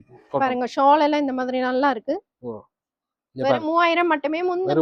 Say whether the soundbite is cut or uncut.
uncut